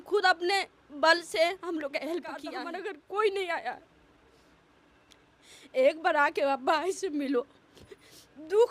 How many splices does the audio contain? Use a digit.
1